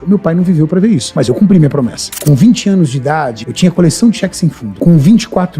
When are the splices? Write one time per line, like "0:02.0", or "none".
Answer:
0:01.1
0:02.1
0:03.4
0:04.7